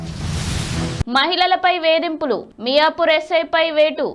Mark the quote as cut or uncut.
cut